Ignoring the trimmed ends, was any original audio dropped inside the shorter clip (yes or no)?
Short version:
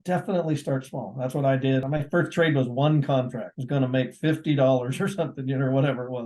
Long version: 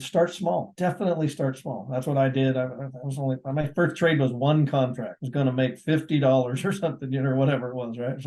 yes